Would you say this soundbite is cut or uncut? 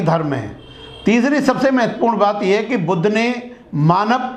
uncut